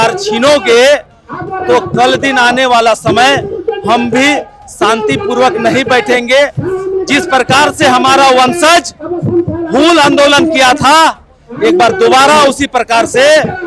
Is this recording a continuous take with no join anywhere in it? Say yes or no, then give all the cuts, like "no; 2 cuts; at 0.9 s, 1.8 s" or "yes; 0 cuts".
yes; 0 cuts